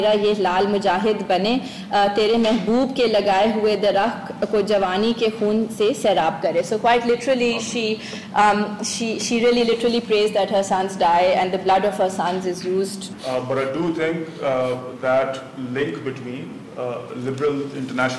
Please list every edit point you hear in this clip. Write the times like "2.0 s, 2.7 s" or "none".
13.1 s